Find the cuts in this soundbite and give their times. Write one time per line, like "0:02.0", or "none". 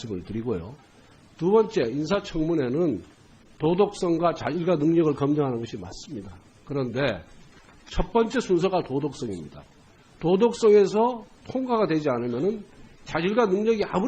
0:12.2